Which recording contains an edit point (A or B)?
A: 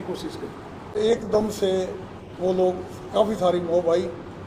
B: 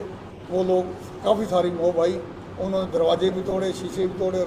A